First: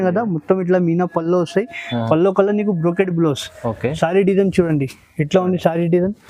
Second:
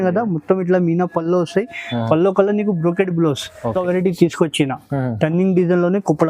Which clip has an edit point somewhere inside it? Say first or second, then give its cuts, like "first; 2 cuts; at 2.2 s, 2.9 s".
second; 1 cut; at 3.7 s